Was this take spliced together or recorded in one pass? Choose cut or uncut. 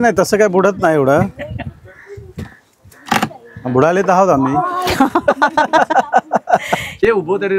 uncut